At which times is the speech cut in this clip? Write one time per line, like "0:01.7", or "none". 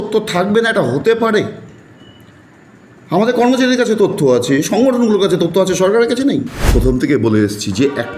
0:06.7